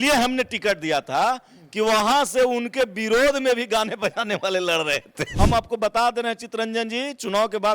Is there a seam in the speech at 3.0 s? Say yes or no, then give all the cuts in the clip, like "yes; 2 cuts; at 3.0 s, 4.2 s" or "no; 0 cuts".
no; 1 cut; at 5.3 s